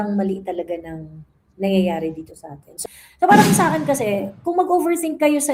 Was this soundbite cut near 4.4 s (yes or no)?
no